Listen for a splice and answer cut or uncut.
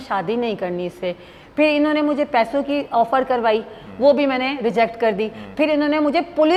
uncut